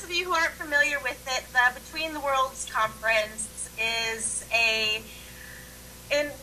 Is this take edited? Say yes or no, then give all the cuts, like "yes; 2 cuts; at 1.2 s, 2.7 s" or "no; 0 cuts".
no; 0 cuts